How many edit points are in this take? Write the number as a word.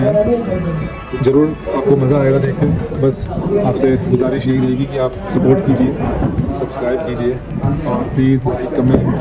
zero